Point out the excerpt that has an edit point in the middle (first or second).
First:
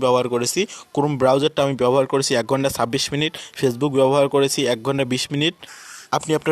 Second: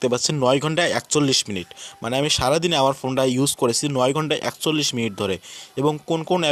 first